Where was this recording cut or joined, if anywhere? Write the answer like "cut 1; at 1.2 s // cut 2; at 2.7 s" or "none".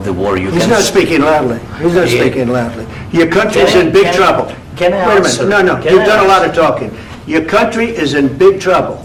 none